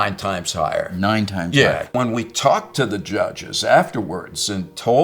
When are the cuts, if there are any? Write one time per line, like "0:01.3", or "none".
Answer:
0:01.9